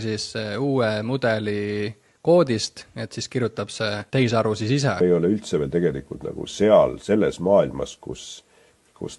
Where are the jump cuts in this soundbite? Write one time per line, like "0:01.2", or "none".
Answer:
0:04.0
0:05.0